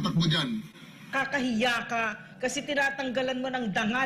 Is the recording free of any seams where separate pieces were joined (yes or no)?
no